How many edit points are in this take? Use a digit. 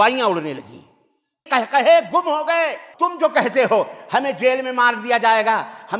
2